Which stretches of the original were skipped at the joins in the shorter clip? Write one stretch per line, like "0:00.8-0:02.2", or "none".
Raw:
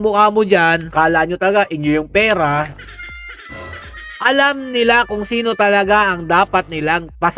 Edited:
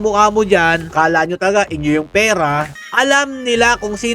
0:02.8-0:04.1